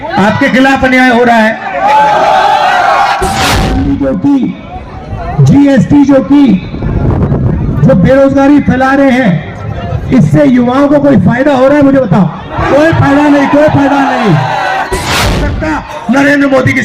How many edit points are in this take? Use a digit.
2